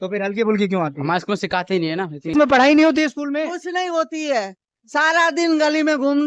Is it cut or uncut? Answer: cut